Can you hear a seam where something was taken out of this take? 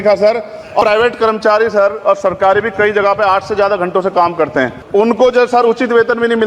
yes; 2 cuts; at 0.8 s, 4.8 s

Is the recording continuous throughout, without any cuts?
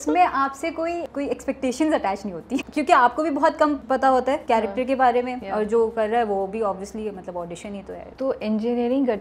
no; 5 cuts; at 1.1 s, 2.6 s, 4.3 s, 5.4 s, 8.1 s

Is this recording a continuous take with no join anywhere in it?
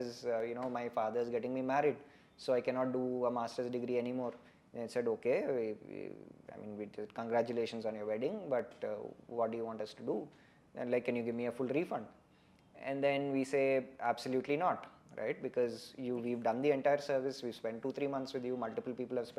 yes; 0 cuts

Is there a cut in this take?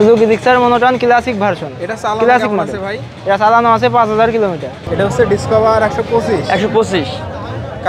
yes; 1 cut; at 4.8 s

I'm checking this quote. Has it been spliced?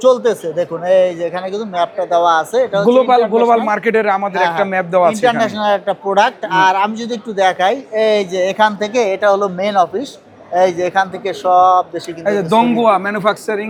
no; 0 cuts

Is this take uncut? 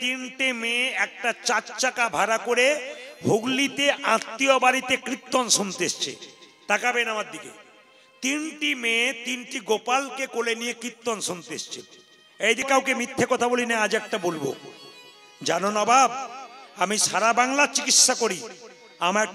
no; 1 cut; at 12.6 s

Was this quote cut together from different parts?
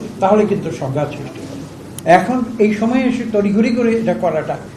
yes; 1 cut; at 1.9 s

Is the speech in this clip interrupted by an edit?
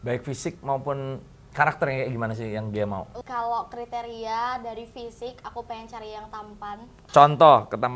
yes; 2 cuts; at 3.2 s, 6.9 s

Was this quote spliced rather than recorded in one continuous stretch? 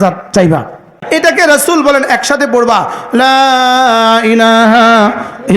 yes; 1 cut; at 1.0 s

